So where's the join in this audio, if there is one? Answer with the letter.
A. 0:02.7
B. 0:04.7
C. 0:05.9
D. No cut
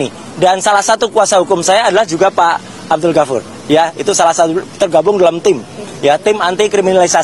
D